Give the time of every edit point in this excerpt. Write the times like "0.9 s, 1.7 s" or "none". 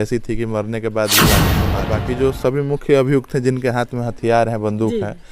1.5 s